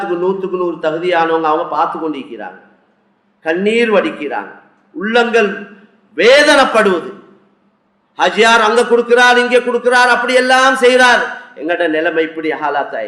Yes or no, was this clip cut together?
no